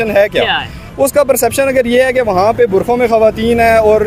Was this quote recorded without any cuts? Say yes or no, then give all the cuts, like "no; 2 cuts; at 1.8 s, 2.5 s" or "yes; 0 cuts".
yes; 0 cuts